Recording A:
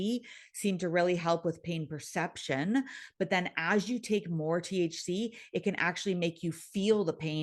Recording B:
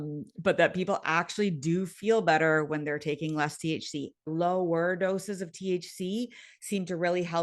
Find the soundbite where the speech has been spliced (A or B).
B